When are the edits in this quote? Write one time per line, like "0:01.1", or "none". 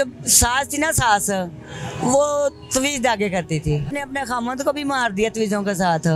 0:03.9